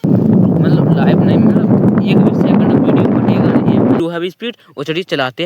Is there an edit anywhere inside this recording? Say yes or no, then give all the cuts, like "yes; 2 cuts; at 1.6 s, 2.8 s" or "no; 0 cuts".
yes; 1 cut; at 4.0 s